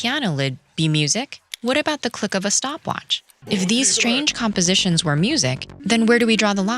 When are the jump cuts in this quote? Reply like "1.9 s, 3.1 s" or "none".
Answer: 1.4 s, 3.3 s, 5.7 s